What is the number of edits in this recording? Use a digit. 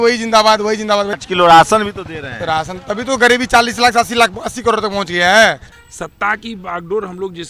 2